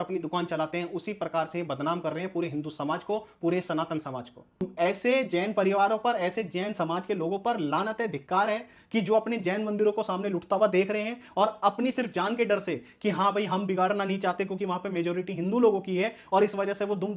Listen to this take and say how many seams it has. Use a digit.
1